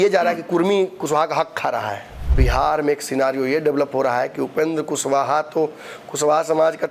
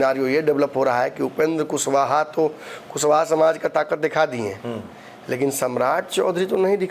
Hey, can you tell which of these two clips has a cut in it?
first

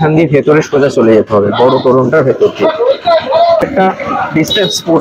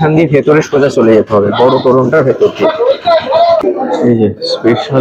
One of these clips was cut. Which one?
second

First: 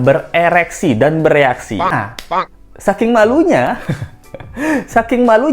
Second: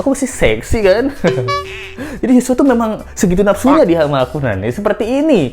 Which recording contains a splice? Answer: first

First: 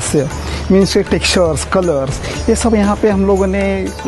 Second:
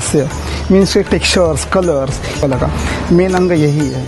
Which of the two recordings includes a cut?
second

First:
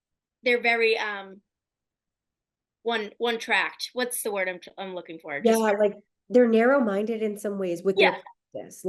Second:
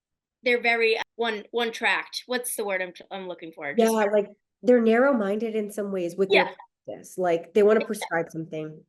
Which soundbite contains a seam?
second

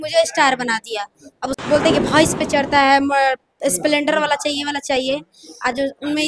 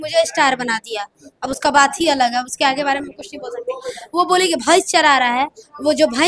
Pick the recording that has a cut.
first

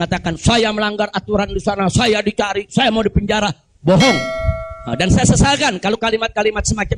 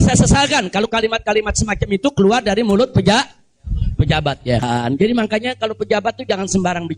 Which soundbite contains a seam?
second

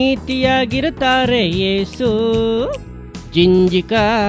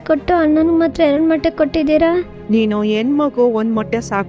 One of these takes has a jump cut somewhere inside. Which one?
second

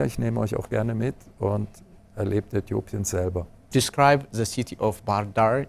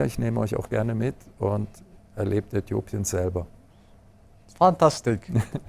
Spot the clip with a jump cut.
first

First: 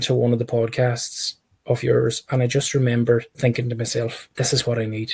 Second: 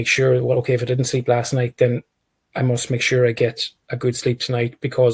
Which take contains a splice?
first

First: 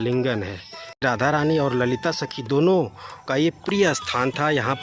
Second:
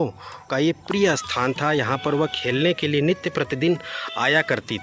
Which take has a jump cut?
first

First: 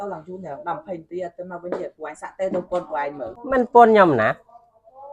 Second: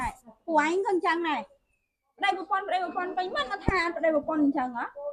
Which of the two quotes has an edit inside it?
first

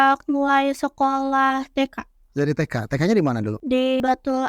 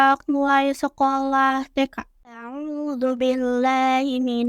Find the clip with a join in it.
second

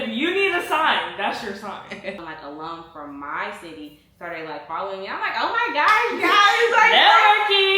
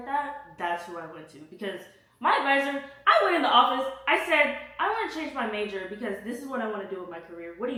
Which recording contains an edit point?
first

